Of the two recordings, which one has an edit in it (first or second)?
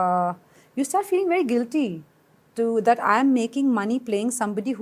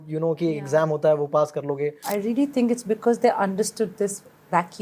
second